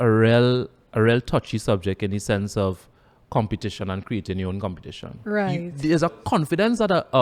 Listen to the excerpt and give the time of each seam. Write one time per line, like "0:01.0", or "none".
0:05.7

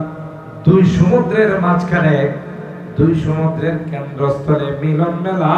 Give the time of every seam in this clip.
none

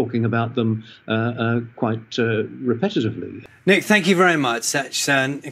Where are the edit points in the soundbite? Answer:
0:03.3

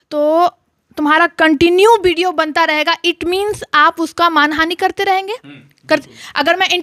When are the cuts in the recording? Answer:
none

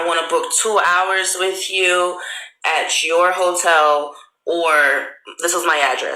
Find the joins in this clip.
0:04.5

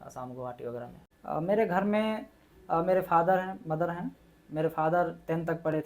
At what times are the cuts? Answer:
0:01.1

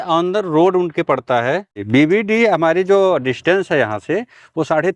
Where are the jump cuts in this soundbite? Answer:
0:01.8

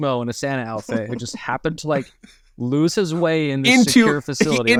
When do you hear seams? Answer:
none

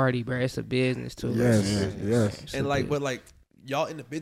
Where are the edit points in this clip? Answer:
none

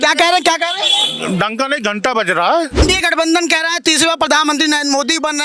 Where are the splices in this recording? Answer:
0:02.8

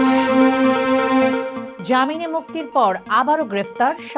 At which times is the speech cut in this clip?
0:01.6

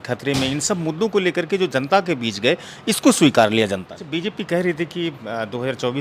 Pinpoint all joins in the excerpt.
0:03.9

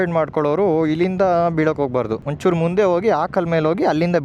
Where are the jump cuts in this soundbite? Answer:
0:02.2

